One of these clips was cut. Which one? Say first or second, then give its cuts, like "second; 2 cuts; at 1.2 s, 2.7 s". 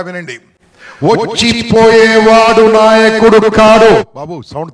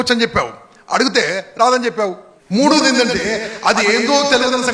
second; 1 cut; at 2.3 s